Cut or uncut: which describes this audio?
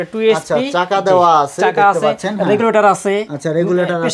uncut